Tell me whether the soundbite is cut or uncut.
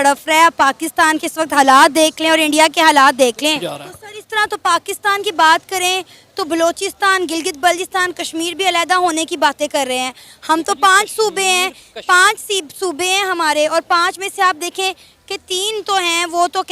cut